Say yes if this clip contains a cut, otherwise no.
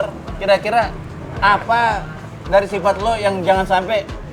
no